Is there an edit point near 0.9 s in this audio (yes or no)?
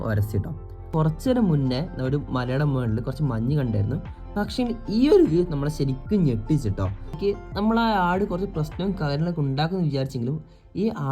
yes